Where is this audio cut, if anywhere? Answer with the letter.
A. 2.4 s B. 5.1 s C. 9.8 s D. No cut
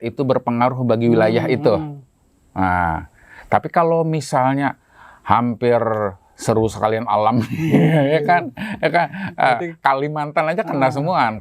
D